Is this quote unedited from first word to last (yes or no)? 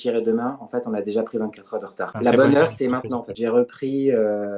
no